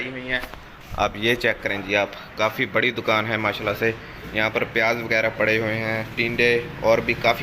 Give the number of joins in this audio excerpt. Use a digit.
1